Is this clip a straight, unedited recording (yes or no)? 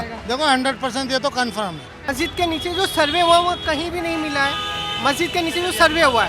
no